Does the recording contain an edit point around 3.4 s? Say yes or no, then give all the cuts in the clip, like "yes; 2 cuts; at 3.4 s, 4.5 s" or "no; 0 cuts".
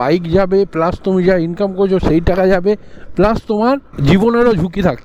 no; 0 cuts